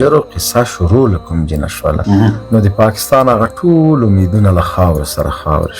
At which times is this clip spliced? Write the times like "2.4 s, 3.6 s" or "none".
2.0 s